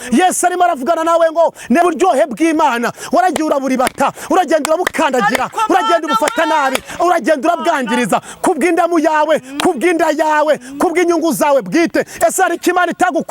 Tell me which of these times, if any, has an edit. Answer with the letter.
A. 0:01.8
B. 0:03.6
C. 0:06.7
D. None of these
A